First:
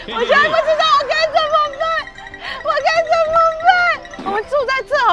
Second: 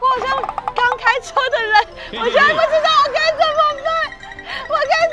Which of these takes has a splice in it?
first; 1 cut; at 4.1 s

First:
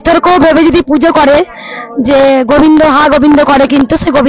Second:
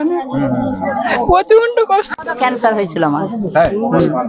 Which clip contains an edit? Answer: second; 1 cut; at 2.1 s

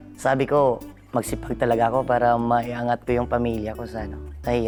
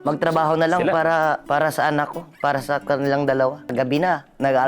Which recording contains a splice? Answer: second; 2 cuts; at 1.4 s, 3.7 s

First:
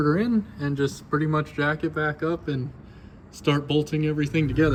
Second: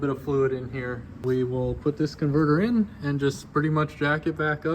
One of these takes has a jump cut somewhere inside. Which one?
second; 1 cut; at 1.2 s

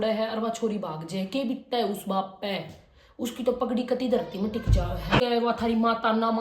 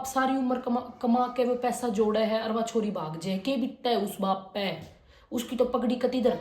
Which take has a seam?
first; 1 cut; at 5.2 s

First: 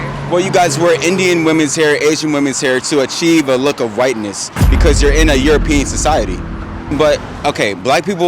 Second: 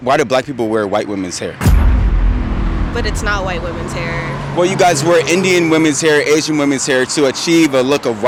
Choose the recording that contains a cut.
first; 1 cut; at 6.9 s

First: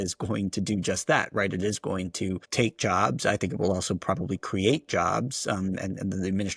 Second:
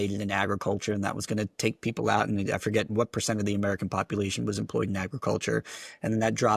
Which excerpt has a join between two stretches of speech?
first; 1 cut; at 2.4 s

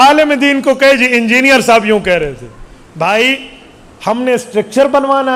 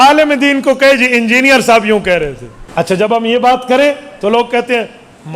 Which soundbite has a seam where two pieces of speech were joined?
second; 1 cut; at 3.1 s

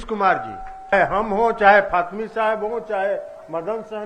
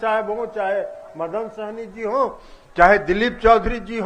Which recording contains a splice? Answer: first; 1 cut; at 0.9 s

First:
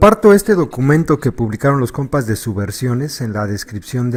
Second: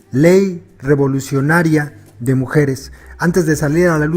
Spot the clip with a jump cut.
second; 1 cut; at 1.4 s

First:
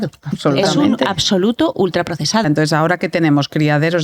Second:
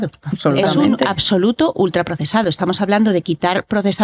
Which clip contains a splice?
first; 1 cut; at 2.4 s

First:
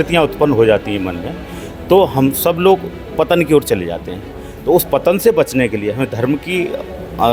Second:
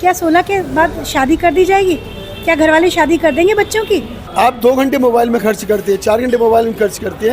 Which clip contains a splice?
second; 1 cut; at 4.2 s

